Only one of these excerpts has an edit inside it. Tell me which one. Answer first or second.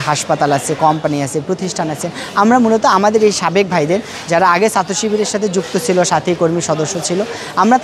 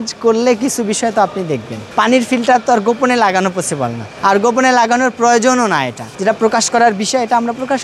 second